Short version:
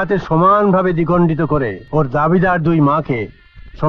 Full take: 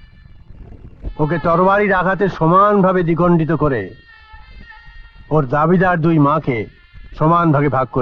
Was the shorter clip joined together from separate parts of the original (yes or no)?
yes